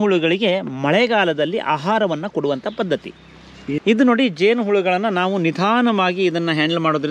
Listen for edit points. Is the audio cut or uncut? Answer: cut